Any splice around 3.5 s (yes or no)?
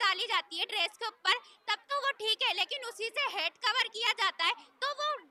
no